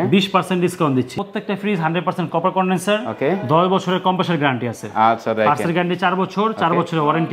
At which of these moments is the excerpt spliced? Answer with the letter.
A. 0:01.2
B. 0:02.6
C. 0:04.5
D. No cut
A